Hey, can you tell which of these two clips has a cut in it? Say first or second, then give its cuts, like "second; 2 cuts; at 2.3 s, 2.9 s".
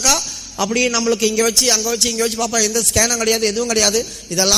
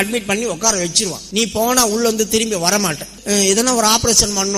second; 2 cuts; at 1.2 s, 3.1 s